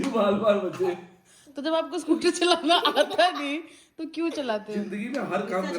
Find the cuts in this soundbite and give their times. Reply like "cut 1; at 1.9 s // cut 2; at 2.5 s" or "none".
none